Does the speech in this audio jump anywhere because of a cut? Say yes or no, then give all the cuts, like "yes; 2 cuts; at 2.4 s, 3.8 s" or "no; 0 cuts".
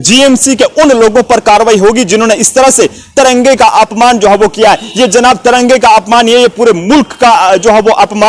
no; 0 cuts